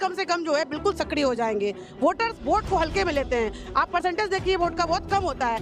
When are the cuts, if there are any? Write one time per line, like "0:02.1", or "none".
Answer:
none

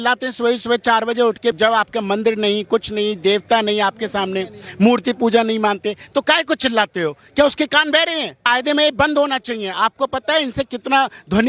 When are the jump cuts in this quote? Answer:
0:01.6
0:08.4

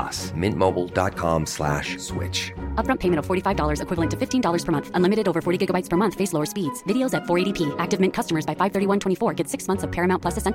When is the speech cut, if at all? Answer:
none

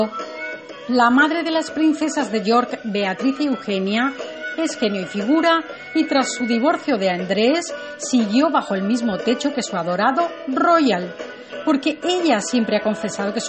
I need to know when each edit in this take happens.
0:12.0

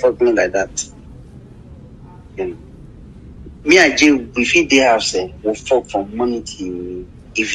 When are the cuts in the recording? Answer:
none

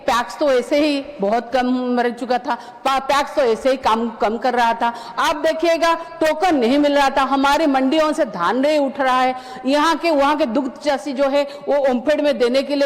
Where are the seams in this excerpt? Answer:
none

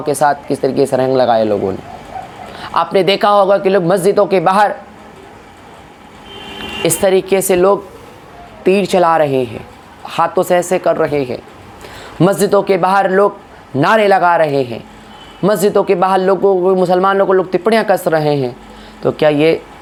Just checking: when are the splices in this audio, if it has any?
none

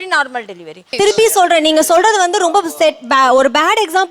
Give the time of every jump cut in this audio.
0:00.9

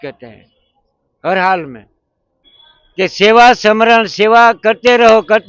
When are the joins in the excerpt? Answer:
0:02.0

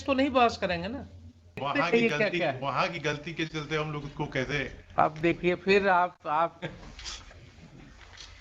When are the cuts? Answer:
0:01.6

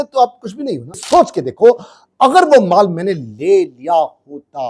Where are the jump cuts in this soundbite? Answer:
0:00.9

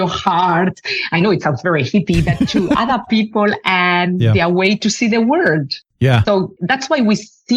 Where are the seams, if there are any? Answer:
none

